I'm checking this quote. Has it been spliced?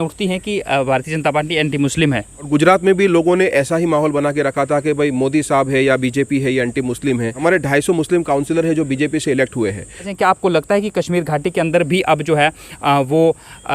yes; 3 cuts; at 2.5 s, 7.3 s, 10.1 s

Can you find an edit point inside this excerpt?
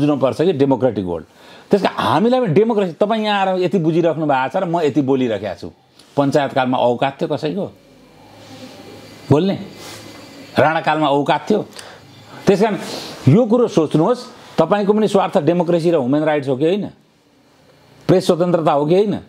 no; 0 cuts

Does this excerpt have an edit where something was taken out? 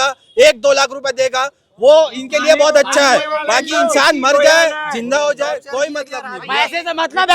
no; 0 cuts

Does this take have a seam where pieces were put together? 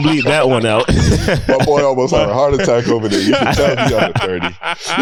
no; 0 cuts

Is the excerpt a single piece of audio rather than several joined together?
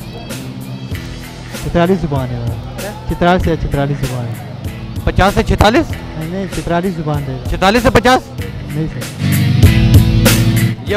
yes; 0 cuts

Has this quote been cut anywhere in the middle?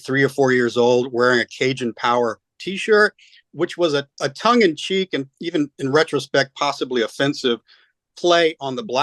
no; 0 cuts

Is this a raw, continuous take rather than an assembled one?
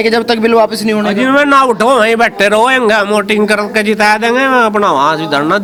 yes; 0 cuts

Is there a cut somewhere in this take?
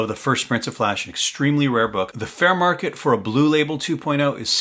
yes; 1 cut; at 2.2 s

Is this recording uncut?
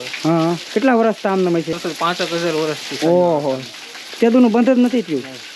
no; 1 cut; at 1.8 s

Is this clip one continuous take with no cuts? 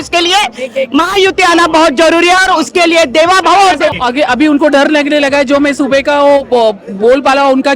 no; 1 cut; at 4.0 s

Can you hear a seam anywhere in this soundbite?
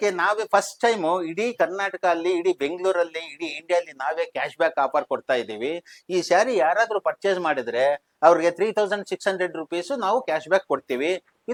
no; 0 cuts

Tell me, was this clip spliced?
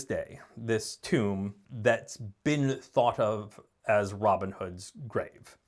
yes; 1 cut; at 1.6 s

